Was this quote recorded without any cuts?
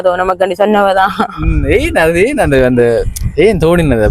yes; 0 cuts

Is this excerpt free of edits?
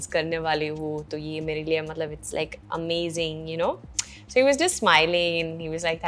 yes; 0 cuts

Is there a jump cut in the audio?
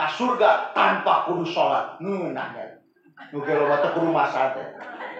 no; 0 cuts

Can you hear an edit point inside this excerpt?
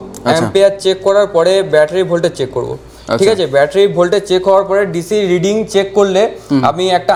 no; 0 cuts

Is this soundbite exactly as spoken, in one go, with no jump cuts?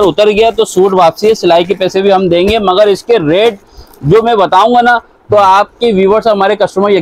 yes; 0 cuts

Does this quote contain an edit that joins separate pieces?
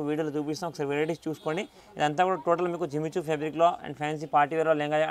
no; 0 cuts

